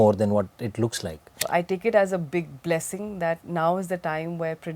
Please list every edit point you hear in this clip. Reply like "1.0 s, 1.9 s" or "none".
1.4 s